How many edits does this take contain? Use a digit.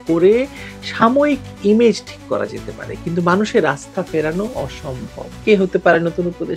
1